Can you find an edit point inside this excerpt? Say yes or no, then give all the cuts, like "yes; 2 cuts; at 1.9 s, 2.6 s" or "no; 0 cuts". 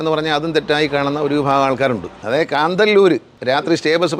yes; 2 cuts; at 2.1 s, 3.3 s